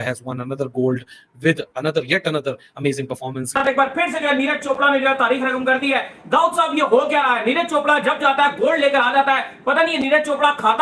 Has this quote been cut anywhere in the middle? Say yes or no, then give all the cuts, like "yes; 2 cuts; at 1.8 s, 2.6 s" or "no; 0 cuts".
yes; 1 cut; at 3.4 s